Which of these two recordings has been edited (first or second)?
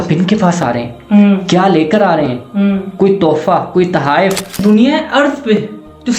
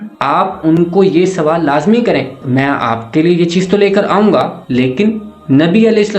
first